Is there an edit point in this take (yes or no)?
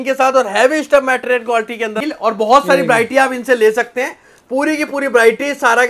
yes